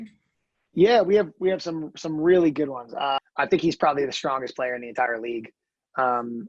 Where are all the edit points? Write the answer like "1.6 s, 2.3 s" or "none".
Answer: 3.2 s